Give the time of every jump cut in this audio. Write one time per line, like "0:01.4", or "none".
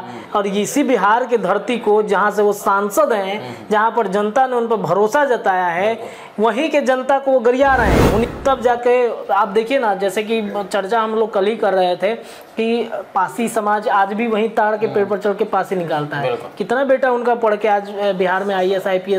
0:08.3

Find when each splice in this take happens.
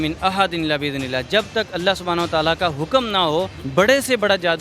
0:03.6

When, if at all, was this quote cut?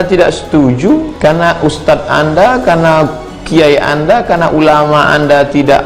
0:01.1

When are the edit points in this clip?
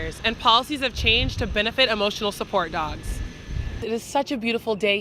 0:03.8

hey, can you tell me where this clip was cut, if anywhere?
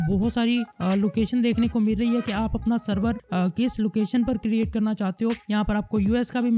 none

